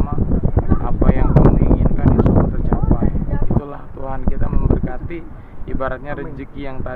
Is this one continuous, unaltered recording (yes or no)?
no